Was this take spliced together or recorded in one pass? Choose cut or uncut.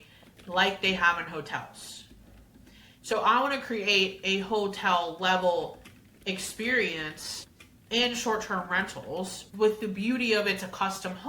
cut